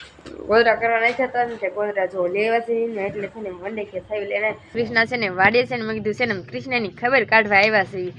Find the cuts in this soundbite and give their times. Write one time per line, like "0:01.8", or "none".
0:04.6